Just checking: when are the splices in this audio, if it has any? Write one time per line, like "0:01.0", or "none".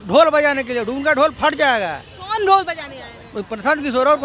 none